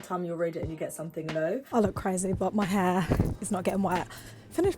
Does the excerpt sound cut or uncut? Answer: cut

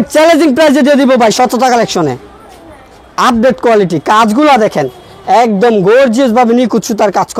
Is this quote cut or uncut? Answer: uncut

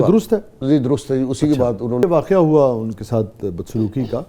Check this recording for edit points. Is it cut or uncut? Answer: cut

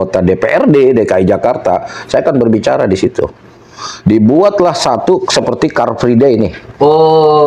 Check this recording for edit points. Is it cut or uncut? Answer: uncut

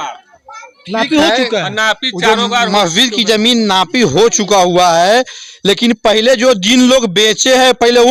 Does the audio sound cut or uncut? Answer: uncut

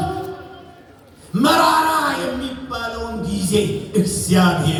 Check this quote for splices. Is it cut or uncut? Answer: uncut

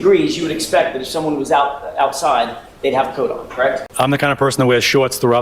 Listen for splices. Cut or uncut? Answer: cut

